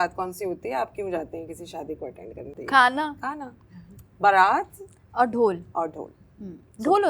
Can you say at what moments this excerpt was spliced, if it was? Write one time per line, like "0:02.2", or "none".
0:02.6